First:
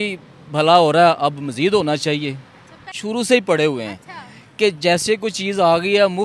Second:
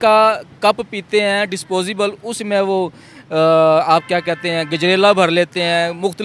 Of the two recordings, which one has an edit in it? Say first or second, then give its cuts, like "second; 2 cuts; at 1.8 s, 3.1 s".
first; 1 cut; at 2.9 s